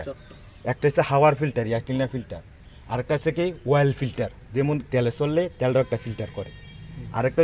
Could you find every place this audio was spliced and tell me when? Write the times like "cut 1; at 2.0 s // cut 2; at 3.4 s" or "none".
none